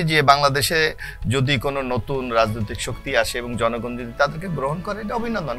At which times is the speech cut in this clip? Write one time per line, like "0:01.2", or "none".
none